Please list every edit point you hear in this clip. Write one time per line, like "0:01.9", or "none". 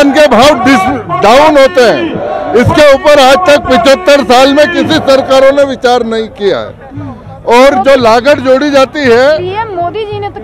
none